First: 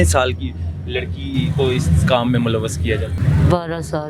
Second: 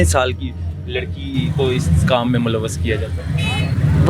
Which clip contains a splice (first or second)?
first